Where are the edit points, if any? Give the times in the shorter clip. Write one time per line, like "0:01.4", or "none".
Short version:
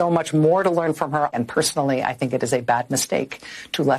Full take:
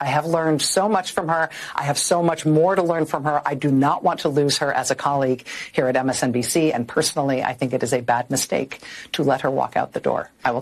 0:01.3